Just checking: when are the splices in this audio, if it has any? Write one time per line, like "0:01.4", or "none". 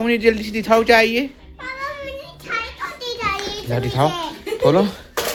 none